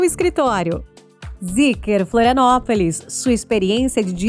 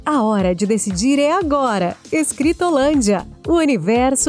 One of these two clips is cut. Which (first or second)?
first